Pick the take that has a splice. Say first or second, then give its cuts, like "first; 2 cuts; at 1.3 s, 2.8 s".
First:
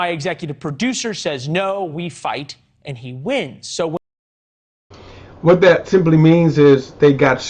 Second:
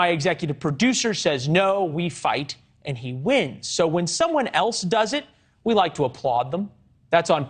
second; 1 cut; at 4.1 s